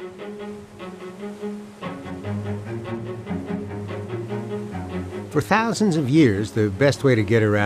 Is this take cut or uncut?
uncut